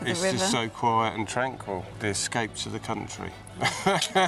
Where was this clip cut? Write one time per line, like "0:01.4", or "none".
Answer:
0:01.9